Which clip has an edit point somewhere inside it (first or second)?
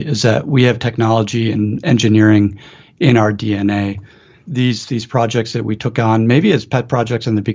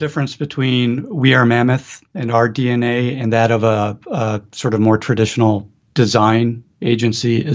first